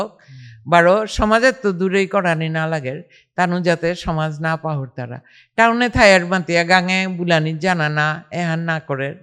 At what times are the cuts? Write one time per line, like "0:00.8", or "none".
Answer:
none